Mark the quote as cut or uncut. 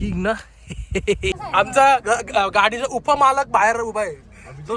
cut